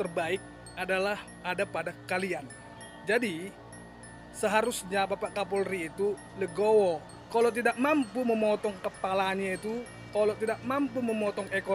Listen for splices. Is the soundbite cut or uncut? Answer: uncut